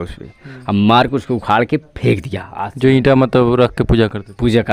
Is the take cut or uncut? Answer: uncut